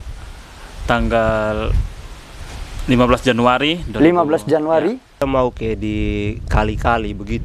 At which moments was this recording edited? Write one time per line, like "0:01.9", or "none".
0:05.2